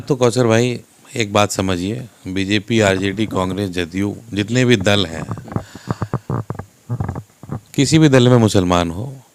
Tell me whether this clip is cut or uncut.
uncut